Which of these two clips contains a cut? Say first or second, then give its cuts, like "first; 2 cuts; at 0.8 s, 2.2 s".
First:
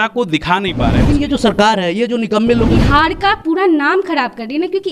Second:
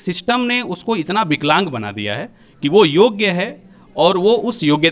first; 2 cuts; at 1.1 s, 2.8 s